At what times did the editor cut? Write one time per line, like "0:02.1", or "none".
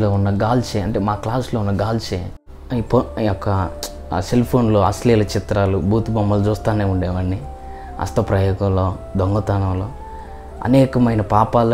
0:02.5